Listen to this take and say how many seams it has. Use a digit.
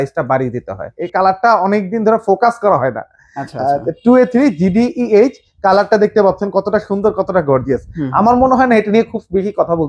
1